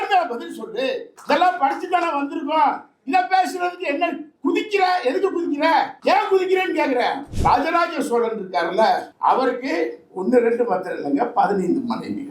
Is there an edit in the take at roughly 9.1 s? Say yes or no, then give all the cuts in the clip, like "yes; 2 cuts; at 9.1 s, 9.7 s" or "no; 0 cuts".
yes; 3 cuts; at 1.1 s, 7.3 s, 9.1 s